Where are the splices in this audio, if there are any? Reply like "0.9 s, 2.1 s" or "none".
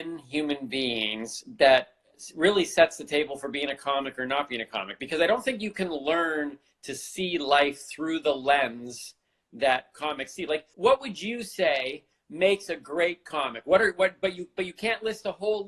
10.7 s